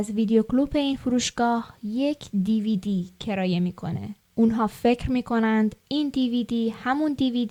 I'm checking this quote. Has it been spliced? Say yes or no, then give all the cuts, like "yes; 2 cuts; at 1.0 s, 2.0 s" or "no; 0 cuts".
no; 0 cuts